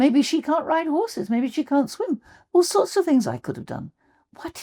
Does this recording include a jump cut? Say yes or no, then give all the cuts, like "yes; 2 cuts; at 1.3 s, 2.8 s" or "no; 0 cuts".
no; 0 cuts